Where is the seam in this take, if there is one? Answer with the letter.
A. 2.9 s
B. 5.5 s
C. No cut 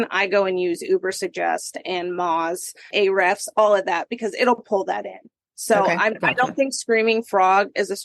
A